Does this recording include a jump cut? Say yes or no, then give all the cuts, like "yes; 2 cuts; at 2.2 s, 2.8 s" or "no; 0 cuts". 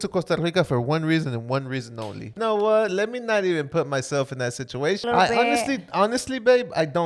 yes; 2 cuts; at 2.3 s, 5.0 s